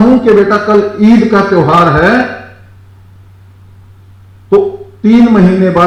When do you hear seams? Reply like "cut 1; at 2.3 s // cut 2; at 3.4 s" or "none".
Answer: none